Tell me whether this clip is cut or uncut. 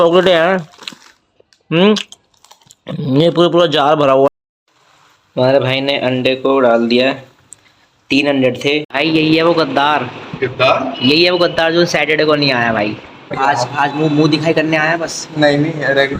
cut